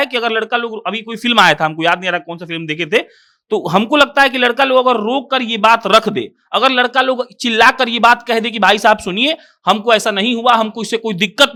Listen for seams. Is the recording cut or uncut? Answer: uncut